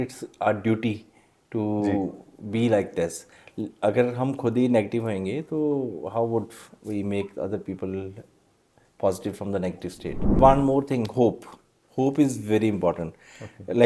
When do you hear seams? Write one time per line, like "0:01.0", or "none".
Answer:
0:10.3